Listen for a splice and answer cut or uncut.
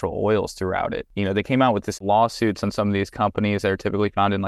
cut